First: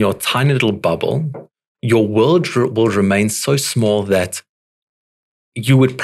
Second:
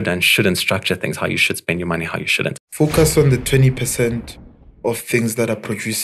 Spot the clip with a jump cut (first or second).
second